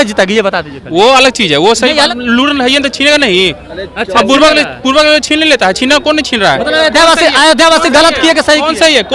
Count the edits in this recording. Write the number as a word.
zero